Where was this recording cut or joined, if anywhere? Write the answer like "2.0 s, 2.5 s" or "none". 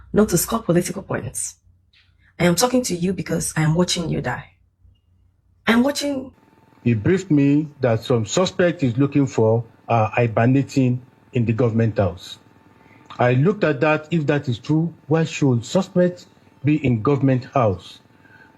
6.3 s